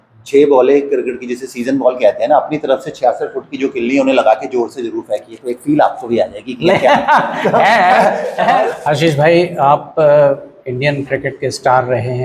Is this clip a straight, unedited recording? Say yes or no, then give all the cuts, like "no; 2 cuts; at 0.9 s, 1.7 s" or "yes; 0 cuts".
no; 1 cut; at 8.8 s